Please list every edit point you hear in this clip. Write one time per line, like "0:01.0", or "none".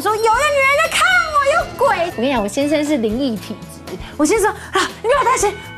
0:02.1